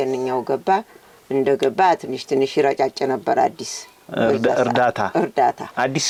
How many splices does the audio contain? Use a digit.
0